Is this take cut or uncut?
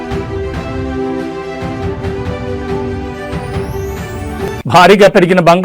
cut